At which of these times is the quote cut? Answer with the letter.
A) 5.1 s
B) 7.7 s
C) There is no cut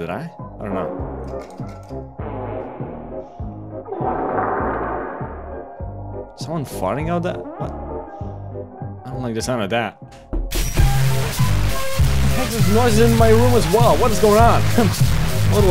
C